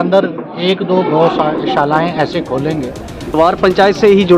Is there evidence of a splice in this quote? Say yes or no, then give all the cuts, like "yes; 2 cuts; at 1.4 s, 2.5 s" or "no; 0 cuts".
yes; 1 cut; at 3.4 s